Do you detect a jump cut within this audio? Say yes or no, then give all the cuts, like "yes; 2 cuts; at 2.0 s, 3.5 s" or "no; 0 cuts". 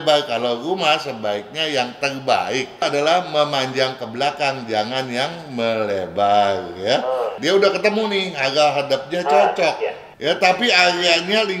yes; 3 cuts; at 2.8 s, 7.4 s, 10.1 s